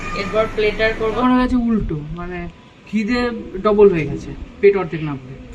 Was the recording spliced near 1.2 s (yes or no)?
yes